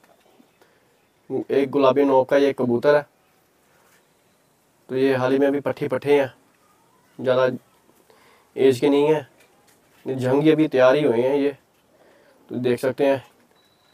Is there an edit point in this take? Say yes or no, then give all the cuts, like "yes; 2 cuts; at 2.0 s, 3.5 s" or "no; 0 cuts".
no; 0 cuts